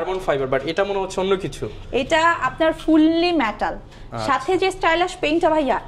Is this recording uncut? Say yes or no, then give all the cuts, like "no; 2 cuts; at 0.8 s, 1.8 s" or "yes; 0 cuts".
yes; 0 cuts